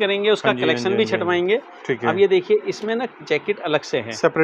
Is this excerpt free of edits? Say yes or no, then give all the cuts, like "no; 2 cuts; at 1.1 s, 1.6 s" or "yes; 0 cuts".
yes; 0 cuts